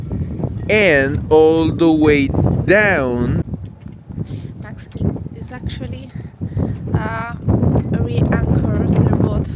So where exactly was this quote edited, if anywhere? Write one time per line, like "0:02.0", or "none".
0:03.4